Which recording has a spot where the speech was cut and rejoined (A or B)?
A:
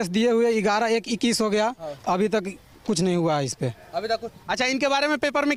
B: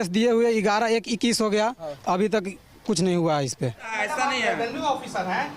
B